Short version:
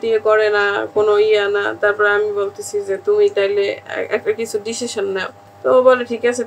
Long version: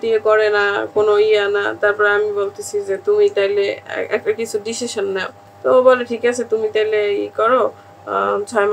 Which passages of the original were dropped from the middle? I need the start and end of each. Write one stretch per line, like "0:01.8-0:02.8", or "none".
none